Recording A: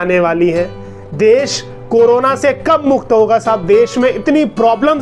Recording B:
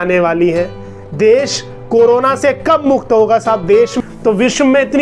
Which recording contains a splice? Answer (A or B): B